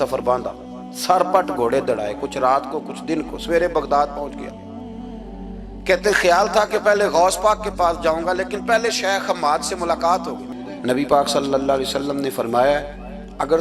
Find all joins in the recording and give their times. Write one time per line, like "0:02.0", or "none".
0:10.5